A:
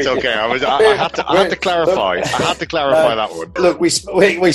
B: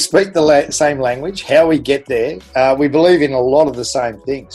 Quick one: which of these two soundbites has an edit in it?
A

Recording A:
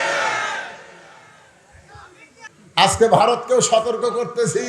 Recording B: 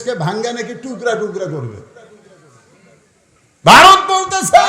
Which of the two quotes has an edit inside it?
A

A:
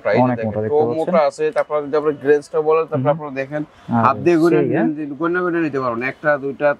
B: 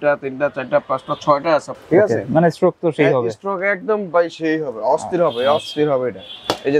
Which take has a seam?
B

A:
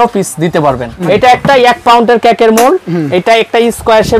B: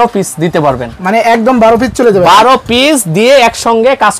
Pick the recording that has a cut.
A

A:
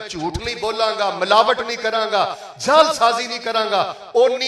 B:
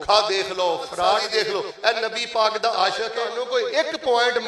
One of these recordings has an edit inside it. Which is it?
B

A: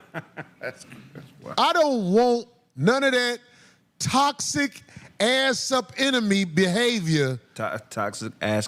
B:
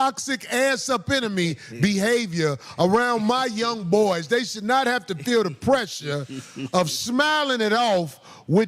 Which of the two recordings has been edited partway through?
B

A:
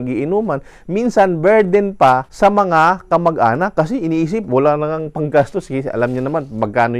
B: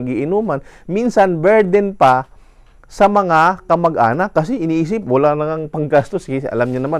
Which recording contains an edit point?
A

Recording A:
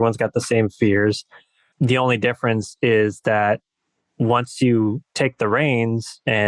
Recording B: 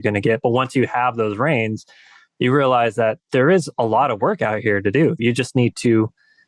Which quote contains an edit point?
B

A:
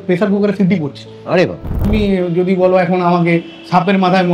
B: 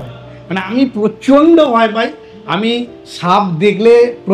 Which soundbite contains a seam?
A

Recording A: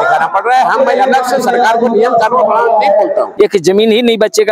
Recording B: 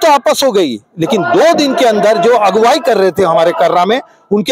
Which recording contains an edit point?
A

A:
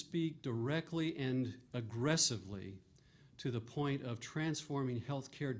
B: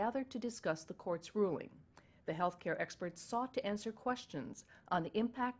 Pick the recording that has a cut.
B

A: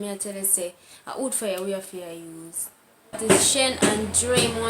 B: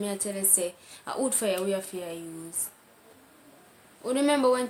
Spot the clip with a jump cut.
A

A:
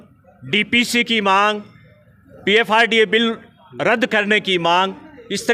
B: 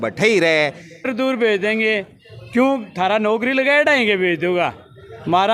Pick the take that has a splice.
B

